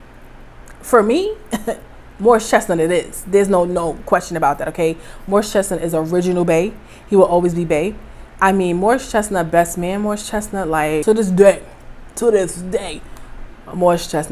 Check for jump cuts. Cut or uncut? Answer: uncut